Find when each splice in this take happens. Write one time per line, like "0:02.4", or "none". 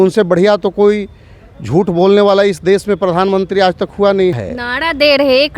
0:04.5